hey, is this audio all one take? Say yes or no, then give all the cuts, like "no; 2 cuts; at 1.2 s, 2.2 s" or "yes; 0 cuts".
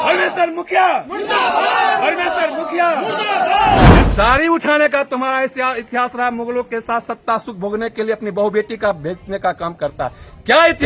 no; 1 cut; at 3.9 s